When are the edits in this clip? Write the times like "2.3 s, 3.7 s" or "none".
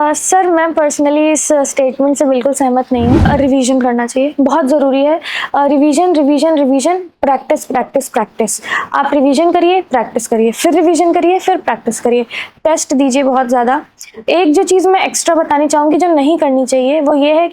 3.2 s